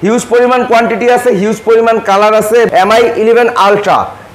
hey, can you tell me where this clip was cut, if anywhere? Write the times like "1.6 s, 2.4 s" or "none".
2.7 s